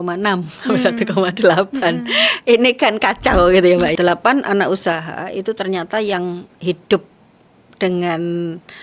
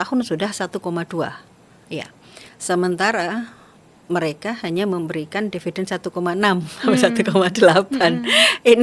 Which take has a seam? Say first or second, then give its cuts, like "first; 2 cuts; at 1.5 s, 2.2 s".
first; 1 cut; at 3.9 s